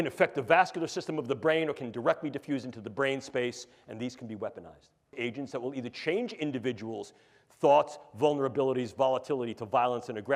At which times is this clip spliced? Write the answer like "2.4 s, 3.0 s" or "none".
5.1 s